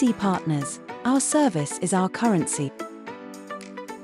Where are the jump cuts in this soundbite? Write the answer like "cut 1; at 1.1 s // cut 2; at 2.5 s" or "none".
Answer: cut 1; at 2.7 s